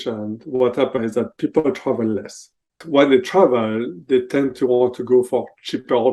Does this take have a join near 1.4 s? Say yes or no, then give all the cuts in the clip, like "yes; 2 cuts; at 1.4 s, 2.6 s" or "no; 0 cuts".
no; 1 cut; at 2.8 s